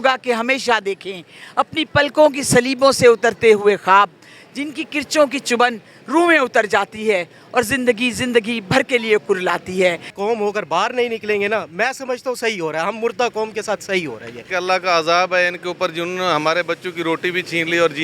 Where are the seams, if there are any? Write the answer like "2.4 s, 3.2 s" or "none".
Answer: 10.1 s, 14.4 s